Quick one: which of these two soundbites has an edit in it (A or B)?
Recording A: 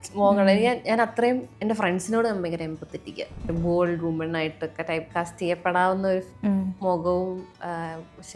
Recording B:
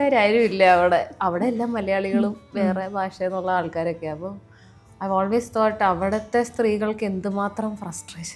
A